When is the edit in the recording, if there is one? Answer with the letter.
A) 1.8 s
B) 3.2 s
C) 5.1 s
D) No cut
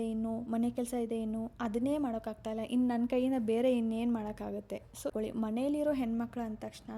C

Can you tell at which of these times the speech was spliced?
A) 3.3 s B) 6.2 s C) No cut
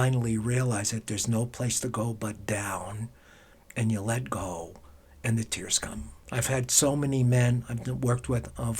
B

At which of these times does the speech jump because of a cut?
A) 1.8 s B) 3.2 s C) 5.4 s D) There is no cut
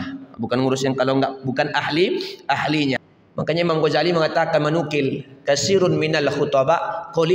B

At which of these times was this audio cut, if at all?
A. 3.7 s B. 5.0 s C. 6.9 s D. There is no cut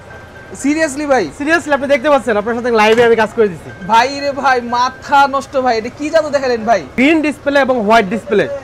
C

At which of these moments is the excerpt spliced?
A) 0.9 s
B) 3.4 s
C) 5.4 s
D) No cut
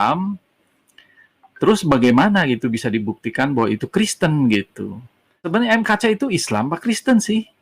C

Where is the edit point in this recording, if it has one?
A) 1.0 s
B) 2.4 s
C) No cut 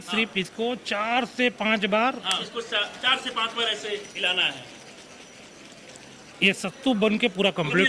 B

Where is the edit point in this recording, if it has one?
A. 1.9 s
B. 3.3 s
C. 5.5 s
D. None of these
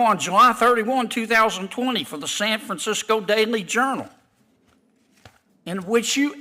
D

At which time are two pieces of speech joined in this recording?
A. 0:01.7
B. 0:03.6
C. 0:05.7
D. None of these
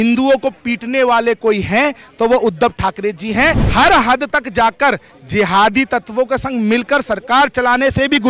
B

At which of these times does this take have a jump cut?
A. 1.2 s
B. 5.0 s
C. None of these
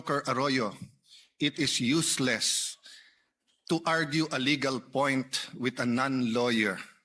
C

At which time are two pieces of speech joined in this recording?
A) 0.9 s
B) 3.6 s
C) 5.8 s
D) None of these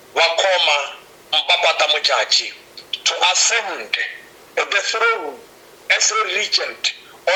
D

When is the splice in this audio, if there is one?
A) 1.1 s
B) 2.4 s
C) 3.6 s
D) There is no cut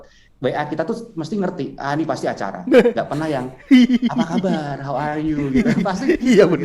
D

